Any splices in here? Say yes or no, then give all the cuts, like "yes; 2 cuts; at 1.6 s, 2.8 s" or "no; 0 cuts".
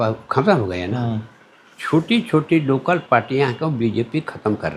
no; 0 cuts